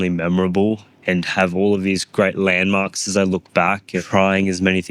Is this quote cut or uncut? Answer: cut